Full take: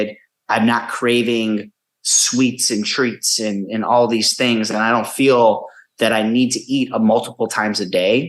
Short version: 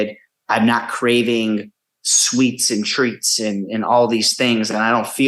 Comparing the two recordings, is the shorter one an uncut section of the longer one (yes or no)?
yes